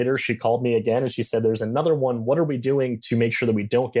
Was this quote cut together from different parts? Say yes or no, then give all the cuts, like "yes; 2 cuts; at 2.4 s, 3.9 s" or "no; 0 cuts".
no; 0 cuts